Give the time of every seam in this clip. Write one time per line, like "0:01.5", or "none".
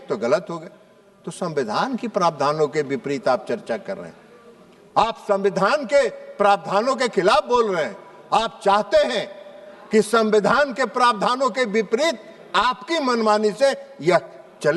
none

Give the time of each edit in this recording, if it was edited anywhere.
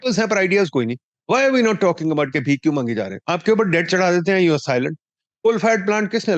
0:01.1
0:03.2

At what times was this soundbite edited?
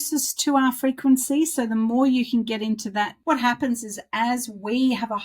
0:03.2

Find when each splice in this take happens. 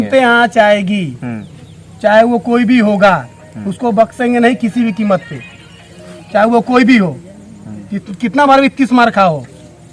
none

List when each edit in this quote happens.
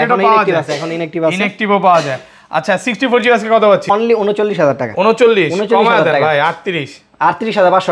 0:03.8

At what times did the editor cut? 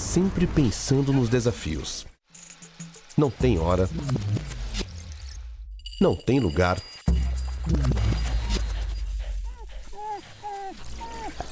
none

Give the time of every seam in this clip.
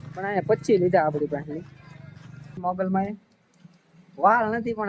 0:02.5

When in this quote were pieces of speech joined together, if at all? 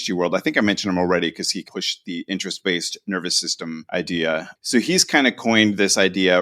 0:01.7
0:03.8
0:04.5

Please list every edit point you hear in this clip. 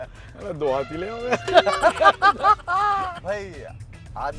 0:03.2

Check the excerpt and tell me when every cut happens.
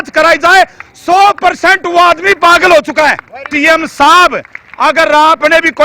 0:03.5

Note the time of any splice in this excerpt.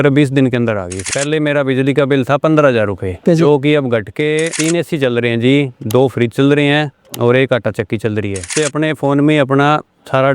0:01.1
0:04.5
0:08.5

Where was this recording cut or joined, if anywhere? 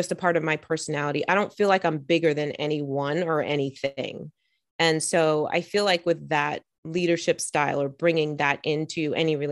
none

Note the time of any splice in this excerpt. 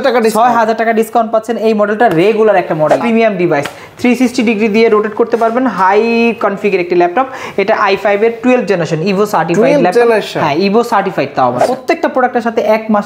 0:03.0
0:11.7

